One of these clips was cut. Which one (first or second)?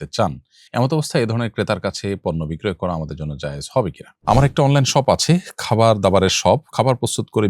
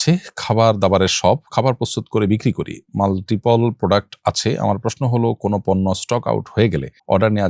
first